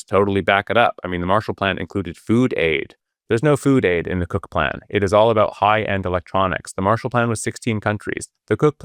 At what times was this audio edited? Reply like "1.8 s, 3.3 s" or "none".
none